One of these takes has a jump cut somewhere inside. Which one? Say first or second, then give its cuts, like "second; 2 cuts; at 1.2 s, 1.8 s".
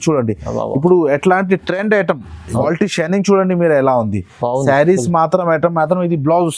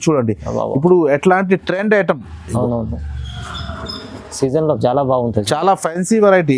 first; 1 cut; at 2.6 s